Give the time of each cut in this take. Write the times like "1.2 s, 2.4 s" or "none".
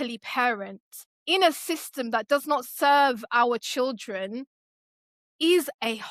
none